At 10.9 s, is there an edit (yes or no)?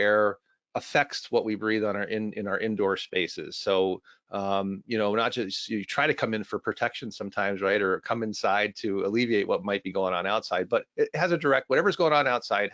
no